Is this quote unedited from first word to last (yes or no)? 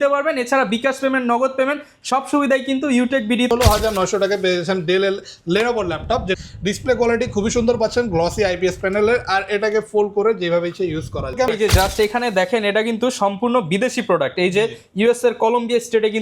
no